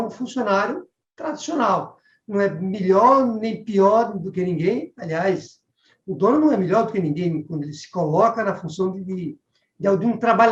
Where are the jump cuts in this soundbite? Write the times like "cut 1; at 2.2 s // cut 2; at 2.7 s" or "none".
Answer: none